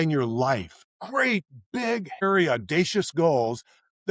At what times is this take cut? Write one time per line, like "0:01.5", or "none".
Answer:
0:01.0
0:02.2